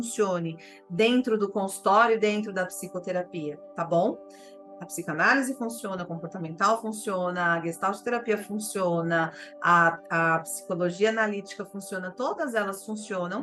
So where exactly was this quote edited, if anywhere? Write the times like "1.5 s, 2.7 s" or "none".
none